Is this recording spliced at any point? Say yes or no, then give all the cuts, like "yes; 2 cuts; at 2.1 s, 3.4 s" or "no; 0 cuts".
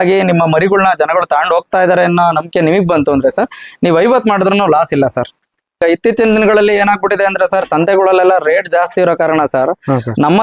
yes; 1 cut; at 5.8 s